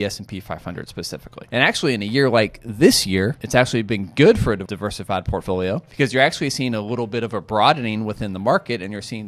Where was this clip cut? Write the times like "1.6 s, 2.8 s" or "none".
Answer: 1.3 s, 3.4 s, 4.6 s, 5.9 s